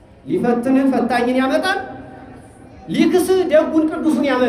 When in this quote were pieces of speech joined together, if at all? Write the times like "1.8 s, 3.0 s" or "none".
none